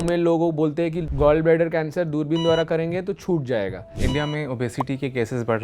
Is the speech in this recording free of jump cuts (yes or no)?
no